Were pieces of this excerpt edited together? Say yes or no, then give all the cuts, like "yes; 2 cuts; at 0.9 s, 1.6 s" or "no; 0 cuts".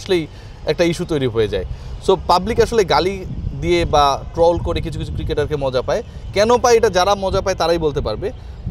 no; 0 cuts